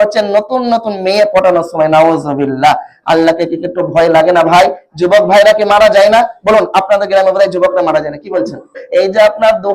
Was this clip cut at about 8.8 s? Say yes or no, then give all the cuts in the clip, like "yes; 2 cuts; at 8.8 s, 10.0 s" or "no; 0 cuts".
yes; 1 cut; at 8.8 s